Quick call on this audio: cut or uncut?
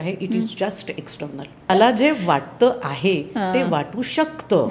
cut